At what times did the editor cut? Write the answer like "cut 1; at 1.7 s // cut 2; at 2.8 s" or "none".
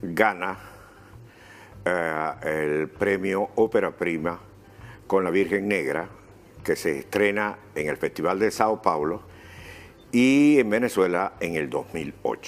cut 1; at 7.6 s